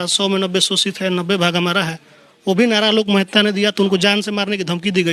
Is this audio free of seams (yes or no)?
yes